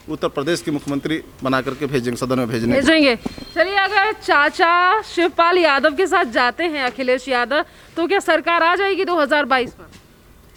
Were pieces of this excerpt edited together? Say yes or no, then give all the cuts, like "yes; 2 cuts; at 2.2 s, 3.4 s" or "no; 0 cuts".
no; 0 cuts